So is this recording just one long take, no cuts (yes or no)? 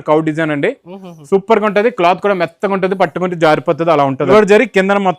no